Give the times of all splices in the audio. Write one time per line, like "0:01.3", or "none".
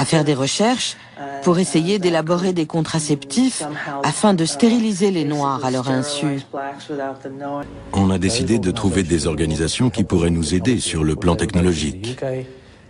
0:07.7